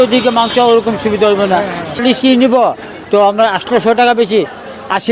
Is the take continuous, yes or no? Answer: no